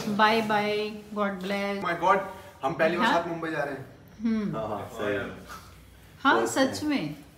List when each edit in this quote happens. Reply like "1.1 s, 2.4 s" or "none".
none